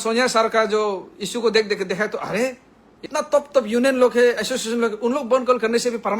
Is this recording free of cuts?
no; 1 cut; at 3.0 s

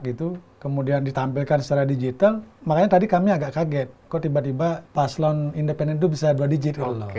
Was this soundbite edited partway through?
yes; 2 cuts; at 2.5 s, 4.9 s

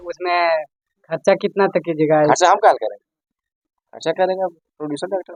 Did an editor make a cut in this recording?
no; 0 cuts

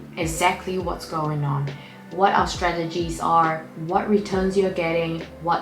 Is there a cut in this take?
no; 0 cuts

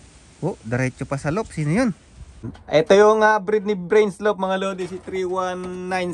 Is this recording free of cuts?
no; 1 cut; at 2.5 s

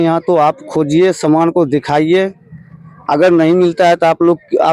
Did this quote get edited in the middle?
no; 0 cuts

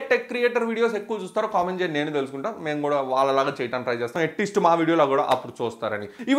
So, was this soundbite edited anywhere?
yes; 1 cut; at 4.1 s

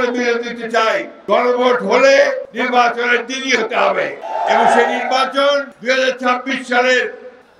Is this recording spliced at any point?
yes; 3 cuts; at 2.5 s, 4.2 s, 5.7 s

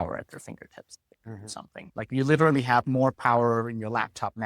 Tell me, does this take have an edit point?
yes; 1 cut; at 1.9 s

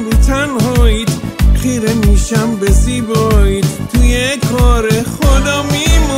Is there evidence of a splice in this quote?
no; 0 cuts

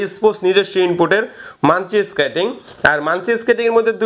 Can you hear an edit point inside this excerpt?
no; 0 cuts

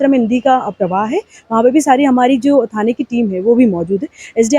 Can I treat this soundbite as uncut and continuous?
yes; 0 cuts

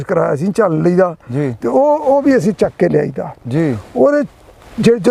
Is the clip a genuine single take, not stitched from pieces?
yes; 0 cuts

